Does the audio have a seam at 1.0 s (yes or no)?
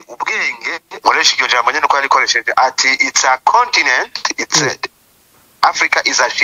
yes